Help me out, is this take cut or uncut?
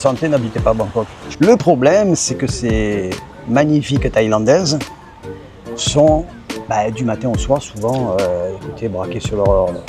cut